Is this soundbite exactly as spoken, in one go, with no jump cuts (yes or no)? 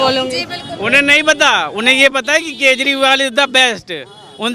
yes